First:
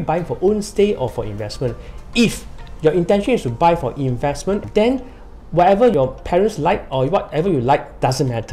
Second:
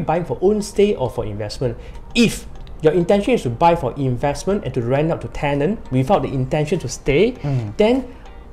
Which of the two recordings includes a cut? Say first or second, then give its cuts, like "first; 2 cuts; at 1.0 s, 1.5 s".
first; 2 cuts; at 4.6 s, 5.9 s